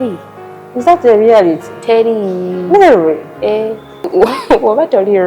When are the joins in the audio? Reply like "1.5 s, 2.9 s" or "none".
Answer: 4.1 s